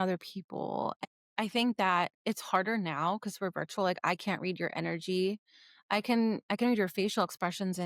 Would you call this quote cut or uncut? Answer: cut